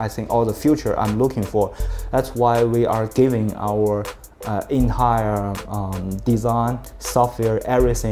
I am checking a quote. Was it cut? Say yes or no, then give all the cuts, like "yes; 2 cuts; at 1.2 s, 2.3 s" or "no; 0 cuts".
yes; 1 cut; at 1.8 s